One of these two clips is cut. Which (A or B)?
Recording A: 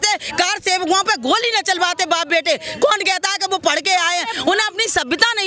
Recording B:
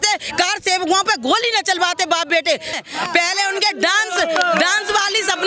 B